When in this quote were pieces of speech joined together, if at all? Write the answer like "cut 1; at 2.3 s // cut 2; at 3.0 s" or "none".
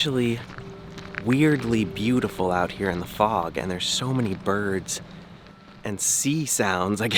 none